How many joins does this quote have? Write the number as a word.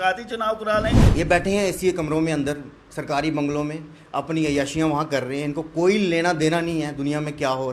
one